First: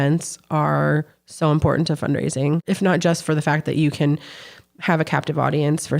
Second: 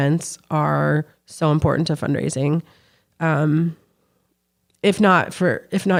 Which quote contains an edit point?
first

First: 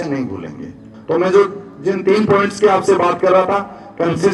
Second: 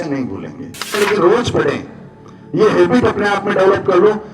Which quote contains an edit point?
second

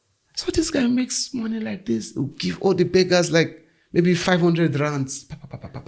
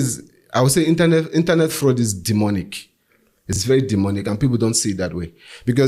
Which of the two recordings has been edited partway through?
second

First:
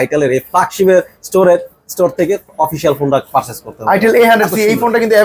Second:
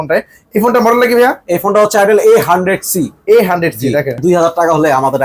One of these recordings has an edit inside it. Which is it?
second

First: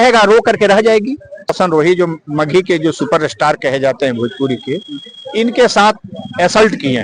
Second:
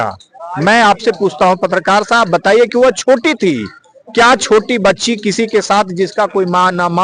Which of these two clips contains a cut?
first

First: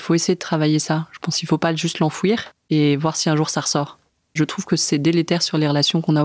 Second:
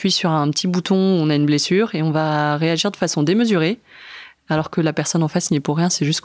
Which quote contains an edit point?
first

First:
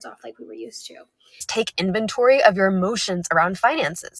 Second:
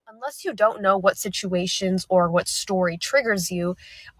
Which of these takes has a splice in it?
first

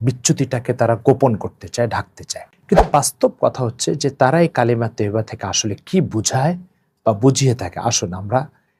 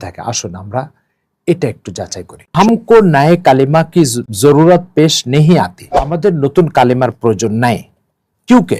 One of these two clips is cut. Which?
second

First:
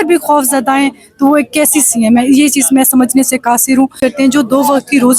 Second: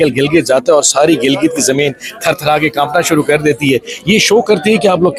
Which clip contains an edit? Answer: first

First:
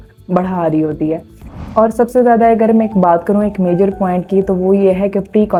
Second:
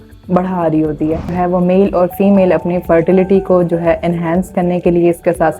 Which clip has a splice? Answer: second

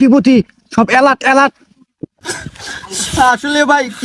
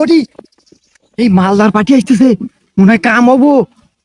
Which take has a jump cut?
first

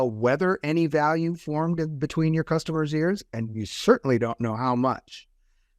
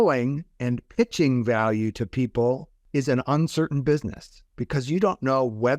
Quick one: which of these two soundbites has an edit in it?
second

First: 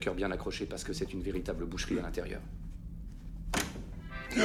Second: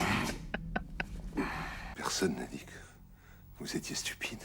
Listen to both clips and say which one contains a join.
second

